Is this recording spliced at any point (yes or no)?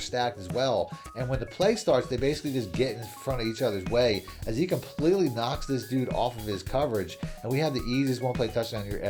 no